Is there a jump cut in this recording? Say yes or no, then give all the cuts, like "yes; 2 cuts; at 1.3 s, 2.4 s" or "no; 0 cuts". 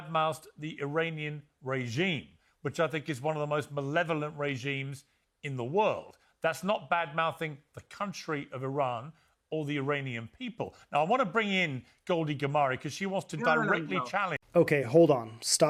no; 0 cuts